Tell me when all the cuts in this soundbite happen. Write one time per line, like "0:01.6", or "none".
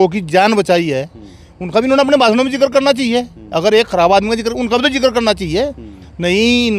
none